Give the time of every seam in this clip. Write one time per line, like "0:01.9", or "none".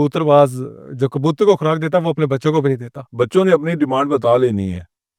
0:03.0

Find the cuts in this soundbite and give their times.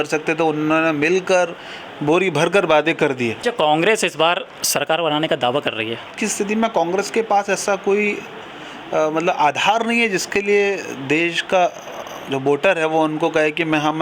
0:03.4
0:06.2

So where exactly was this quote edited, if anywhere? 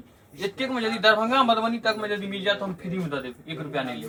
none

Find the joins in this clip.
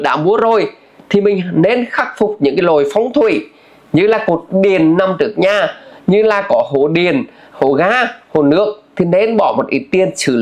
none

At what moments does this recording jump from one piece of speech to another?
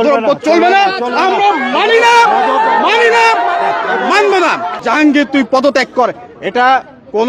0:04.7

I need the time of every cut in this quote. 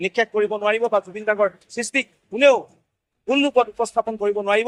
none

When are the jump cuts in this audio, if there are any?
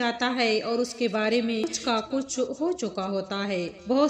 0:01.7

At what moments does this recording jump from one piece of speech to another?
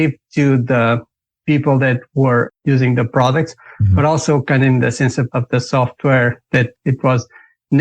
none

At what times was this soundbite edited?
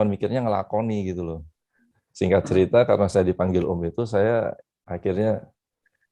0:01.8

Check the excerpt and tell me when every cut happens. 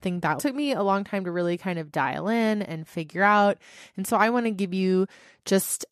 none

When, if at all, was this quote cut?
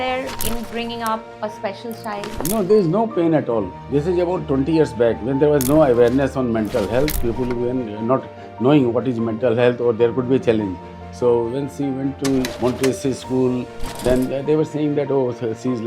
0:03.8
0:12.5

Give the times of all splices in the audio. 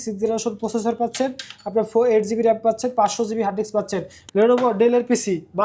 0:04.2

